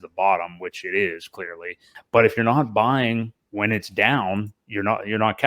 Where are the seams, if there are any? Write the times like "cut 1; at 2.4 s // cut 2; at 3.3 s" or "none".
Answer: cut 1; at 1.9 s

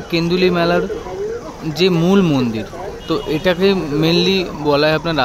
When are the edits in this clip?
none

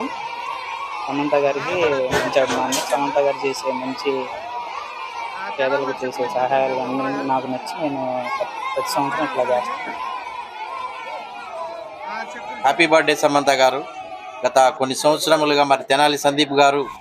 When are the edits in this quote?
cut 1; at 9.6 s // cut 2; at 12.6 s

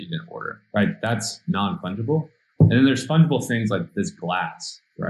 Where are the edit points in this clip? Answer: none

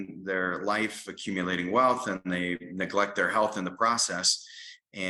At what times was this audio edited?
none

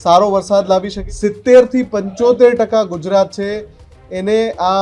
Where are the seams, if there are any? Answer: cut 1; at 1.0 s

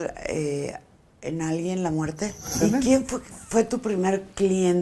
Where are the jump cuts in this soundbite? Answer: cut 1; at 2.6 s

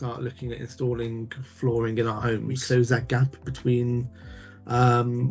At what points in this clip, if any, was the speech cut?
cut 1; at 2.6 s

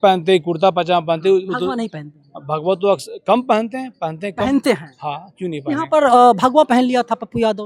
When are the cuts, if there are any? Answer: none

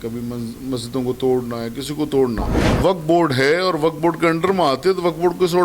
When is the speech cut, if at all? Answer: cut 1; at 2.6 s

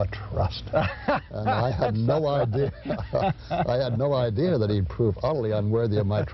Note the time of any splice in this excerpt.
none

